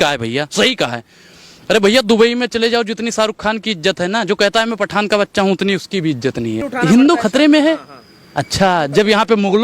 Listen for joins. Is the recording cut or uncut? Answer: cut